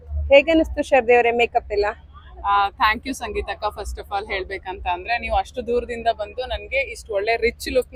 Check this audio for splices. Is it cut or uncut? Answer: uncut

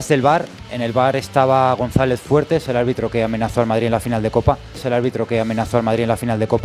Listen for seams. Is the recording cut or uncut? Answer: uncut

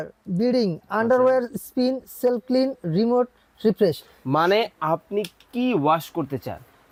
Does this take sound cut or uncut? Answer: uncut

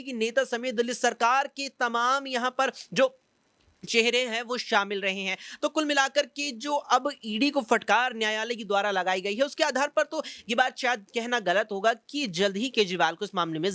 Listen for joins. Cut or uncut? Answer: uncut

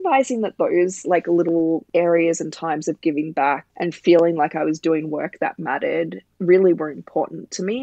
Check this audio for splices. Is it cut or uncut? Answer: cut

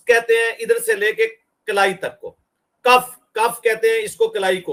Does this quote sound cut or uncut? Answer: uncut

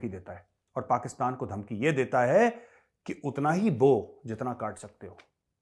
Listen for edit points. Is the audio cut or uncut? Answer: uncut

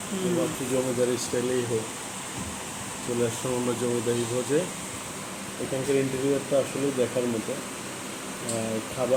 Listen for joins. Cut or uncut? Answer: uncut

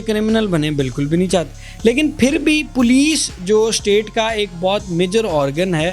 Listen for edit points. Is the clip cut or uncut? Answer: uncut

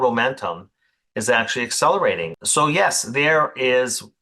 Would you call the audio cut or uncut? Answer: cut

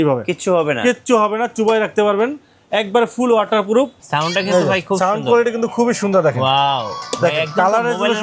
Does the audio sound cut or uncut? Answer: cut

